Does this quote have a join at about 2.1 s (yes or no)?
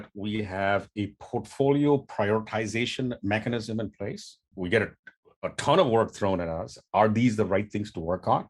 no